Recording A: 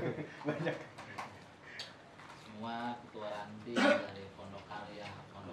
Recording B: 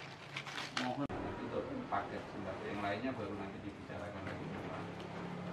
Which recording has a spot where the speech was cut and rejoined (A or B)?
B